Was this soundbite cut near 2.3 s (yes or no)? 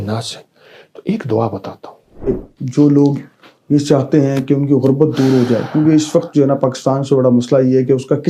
yes